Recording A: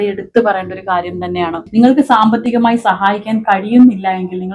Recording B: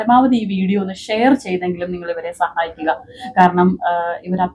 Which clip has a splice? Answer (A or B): A